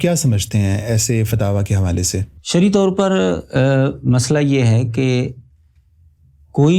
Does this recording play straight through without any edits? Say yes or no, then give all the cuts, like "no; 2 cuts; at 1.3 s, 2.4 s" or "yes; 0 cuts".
yes; 0 cuts